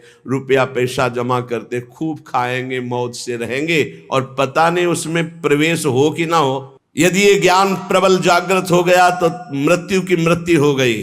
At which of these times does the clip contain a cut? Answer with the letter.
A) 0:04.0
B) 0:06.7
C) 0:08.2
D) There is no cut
B